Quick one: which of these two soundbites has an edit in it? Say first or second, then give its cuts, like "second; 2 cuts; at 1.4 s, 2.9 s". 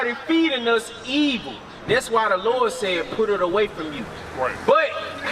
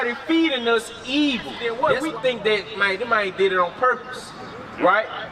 second; 1 cut; at 1.6 s